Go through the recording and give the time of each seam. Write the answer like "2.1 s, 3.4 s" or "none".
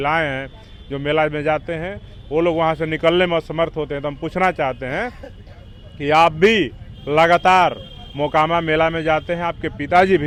none